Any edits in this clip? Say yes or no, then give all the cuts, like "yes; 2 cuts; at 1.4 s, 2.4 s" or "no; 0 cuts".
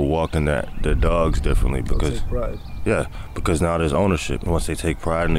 yes; 1 cut; at 4.4 s